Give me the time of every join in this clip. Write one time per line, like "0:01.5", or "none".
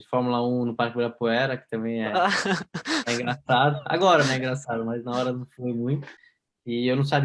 0:06.2

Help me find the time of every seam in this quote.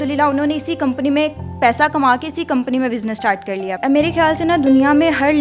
0:03.8

